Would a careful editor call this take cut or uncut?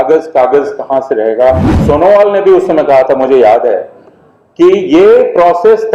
cut